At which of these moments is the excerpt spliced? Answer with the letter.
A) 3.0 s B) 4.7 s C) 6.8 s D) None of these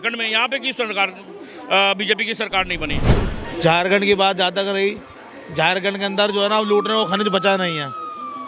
A